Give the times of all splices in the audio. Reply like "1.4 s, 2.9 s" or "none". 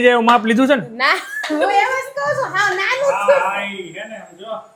none